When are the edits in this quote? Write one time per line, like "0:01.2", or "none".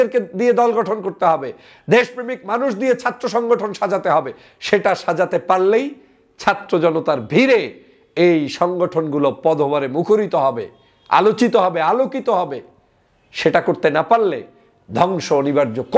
none